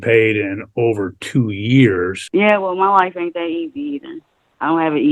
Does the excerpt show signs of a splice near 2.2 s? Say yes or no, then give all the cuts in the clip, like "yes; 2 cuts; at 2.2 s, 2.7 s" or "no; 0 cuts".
yes; 1 cut; at 2.2 s